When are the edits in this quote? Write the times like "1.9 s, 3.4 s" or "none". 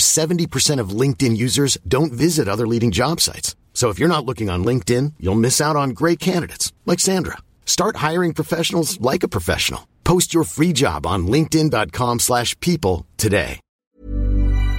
13.7 s